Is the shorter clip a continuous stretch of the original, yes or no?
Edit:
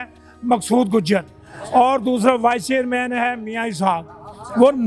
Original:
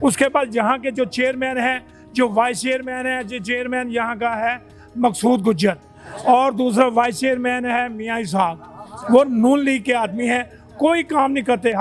yes